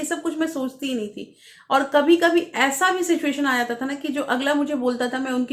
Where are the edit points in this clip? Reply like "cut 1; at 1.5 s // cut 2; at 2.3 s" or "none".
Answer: none